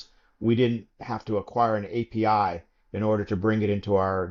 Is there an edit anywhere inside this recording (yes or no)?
no